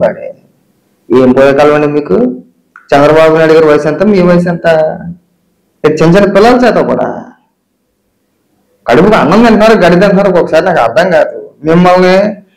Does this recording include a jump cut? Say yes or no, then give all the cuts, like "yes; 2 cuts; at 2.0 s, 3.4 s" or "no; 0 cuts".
no; 0 cuts